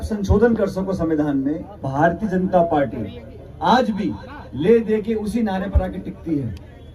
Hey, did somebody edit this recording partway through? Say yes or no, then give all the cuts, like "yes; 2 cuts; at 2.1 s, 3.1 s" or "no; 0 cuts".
yes; 1 cut; at 1.7 s